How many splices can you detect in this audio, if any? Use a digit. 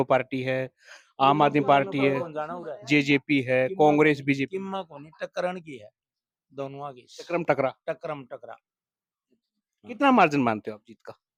0